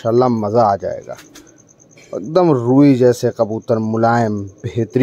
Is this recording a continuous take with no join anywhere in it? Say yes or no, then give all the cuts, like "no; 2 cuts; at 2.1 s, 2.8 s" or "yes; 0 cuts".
yes; 0 cuts